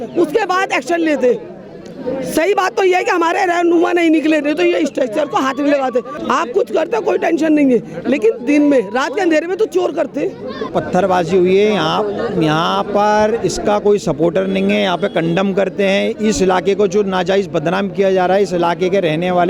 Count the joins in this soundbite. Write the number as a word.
two